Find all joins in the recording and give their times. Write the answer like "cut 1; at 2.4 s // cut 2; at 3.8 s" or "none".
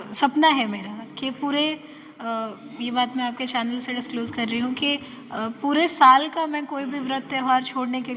none